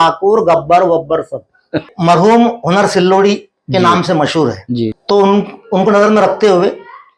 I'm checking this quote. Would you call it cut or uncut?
cut